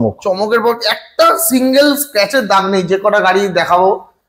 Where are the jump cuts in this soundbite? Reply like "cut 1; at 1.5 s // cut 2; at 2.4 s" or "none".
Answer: none